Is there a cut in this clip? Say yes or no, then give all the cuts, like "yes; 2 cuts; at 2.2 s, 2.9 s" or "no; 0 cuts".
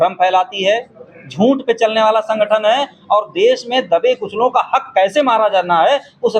no; 0 cuts